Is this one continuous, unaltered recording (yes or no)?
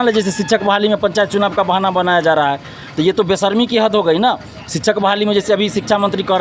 yes